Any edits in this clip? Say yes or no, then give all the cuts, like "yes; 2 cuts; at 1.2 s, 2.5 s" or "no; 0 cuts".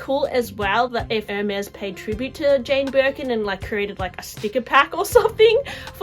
yes; 1 cut; at 1.3 s